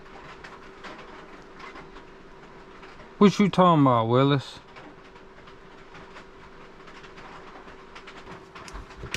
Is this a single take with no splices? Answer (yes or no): no